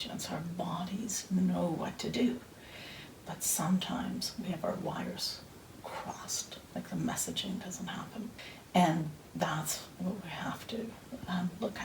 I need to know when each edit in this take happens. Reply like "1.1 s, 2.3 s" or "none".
8.5 s